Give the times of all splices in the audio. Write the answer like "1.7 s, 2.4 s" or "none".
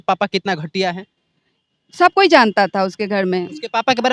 none